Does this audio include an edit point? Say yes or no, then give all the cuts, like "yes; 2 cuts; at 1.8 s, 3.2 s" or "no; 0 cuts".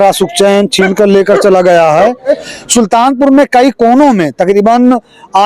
yes; 1 cut; at 2.3 s